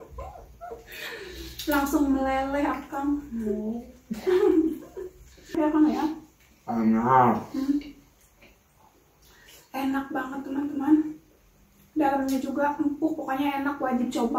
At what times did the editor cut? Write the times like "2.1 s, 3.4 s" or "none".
5.5 s